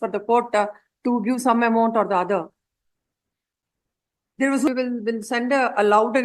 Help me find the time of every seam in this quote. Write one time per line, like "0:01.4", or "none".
0:04.7